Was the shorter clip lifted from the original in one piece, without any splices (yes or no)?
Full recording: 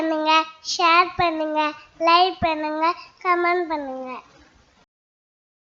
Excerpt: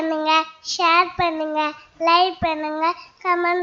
yes